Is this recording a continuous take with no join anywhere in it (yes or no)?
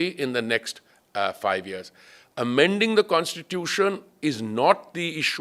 yes